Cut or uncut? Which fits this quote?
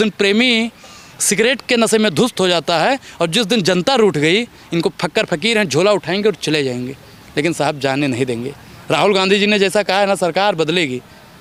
uncut